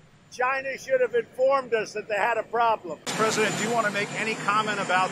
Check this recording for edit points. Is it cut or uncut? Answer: cut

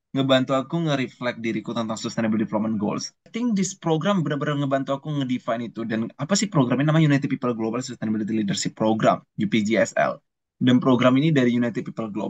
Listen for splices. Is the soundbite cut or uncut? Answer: cut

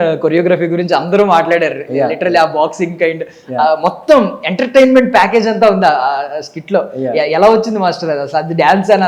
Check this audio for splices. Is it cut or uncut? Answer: uncut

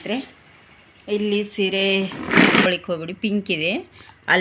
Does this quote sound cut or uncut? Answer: cut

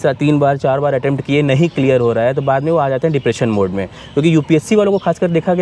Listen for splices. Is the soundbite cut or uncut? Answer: uncut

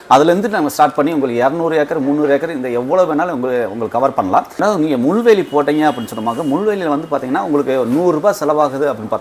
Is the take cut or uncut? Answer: cut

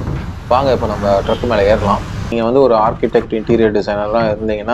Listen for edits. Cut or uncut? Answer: cut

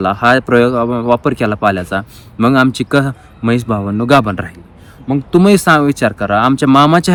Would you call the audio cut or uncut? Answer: uncut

